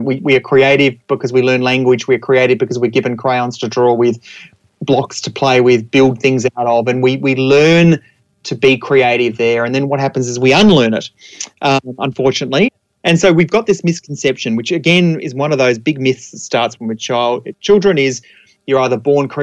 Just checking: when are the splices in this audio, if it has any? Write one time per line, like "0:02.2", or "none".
0:12.7